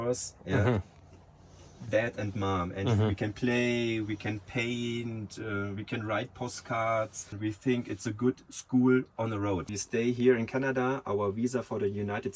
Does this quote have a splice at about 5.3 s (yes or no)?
no